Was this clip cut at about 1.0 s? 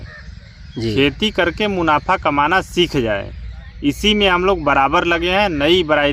no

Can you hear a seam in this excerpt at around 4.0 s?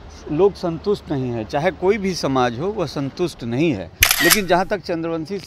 yes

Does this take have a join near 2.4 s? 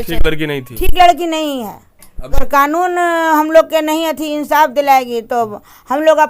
yes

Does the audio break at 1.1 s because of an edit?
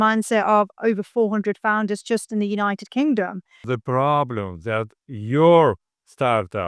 no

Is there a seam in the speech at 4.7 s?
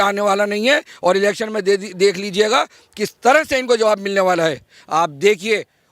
yes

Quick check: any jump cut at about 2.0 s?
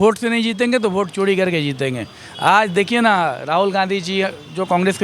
no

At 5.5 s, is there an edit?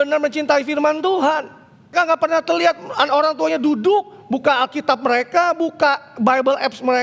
no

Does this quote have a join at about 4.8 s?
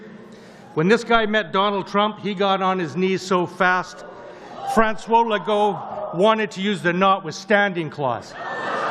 no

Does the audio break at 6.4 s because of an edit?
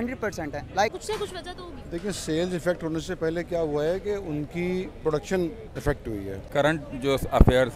yes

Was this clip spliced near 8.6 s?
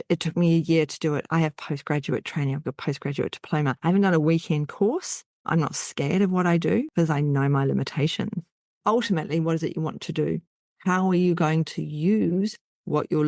yes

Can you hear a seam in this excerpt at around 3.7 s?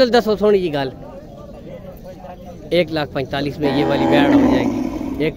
no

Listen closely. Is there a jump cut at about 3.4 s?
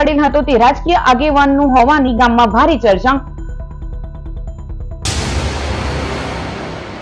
no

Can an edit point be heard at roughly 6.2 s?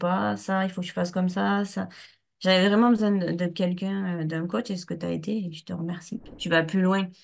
yes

